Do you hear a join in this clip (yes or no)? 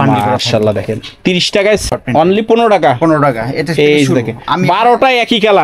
yes